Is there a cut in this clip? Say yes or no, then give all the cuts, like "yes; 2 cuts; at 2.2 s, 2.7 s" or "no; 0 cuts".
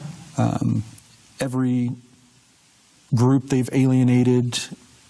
no; 0 cuts